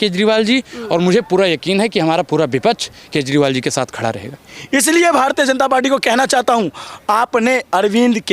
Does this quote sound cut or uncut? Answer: cut